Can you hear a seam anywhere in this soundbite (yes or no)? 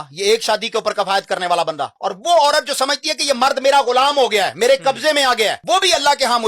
yes